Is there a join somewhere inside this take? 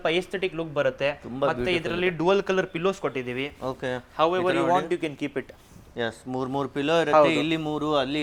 no; 0 cuts

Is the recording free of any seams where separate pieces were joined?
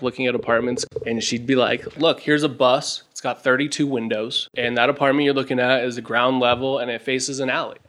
no; 2 cuts; at 0.9 s, 2.0 s

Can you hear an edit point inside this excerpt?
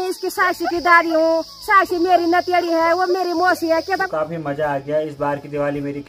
yes; 1 cut; at 4.1 s

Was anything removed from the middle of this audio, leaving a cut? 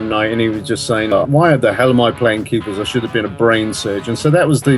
yes; 1 cut; at 1.1 s

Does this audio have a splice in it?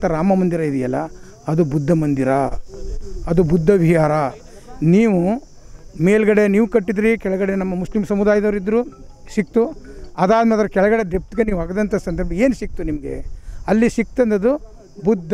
no; 0 cuts

